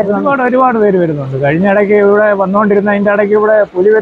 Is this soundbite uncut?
yes; 0 cuts

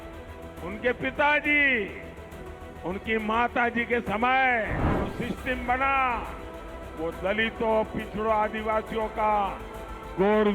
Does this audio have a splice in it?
yes; 1 cut; at 4.8 s

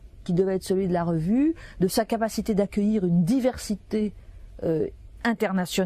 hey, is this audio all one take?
yes; 0 cuts

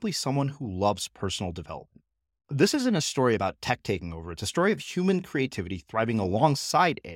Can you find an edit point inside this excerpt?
no; 0 cuts

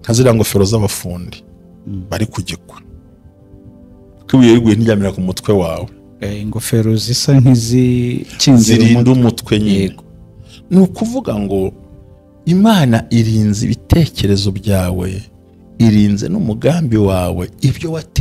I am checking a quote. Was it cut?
no; 0 cuts

